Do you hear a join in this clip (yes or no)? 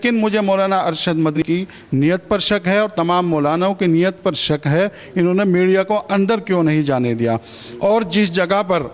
yes